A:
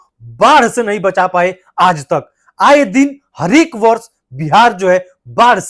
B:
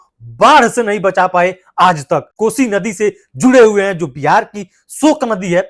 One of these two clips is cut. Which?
B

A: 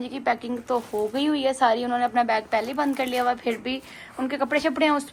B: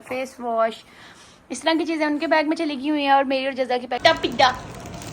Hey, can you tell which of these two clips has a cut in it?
B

